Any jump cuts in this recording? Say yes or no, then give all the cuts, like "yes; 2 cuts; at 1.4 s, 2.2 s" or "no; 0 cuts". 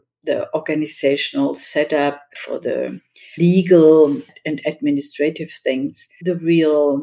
yes; 1 cut; at 6.1 s